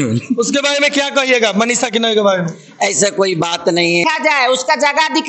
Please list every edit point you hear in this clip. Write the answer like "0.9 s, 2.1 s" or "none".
4.0 s